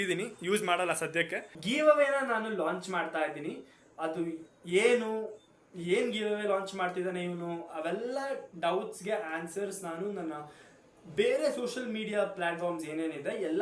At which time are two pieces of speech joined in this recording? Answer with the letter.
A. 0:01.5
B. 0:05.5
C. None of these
A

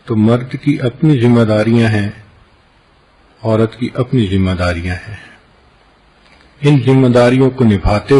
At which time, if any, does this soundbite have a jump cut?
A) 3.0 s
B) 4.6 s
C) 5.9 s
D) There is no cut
B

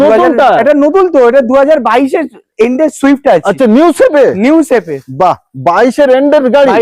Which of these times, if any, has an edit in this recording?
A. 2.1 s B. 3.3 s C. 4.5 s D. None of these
D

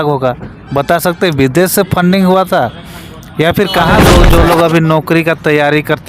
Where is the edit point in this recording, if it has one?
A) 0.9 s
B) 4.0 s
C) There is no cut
B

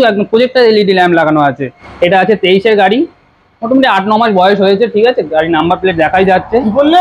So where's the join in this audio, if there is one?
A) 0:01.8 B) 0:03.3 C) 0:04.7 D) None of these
A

